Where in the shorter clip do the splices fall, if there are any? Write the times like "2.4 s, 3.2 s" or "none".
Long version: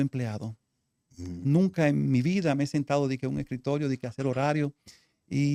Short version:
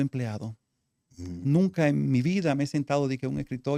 none